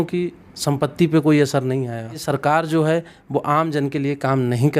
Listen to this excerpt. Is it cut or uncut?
cut